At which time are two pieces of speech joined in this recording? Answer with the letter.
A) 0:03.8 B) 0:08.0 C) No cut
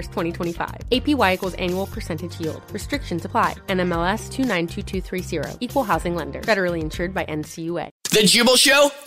B